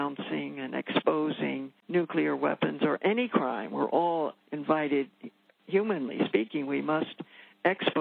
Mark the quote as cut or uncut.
cut